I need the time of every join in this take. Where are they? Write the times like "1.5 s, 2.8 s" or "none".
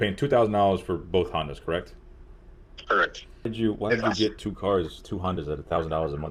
none